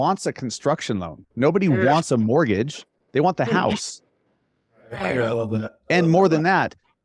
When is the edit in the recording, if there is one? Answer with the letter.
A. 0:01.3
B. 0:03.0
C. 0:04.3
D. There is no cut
D